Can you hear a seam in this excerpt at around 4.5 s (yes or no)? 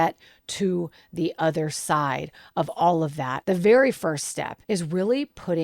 yes